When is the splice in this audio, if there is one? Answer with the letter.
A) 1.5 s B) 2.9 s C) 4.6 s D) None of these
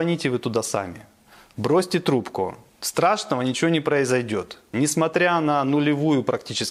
C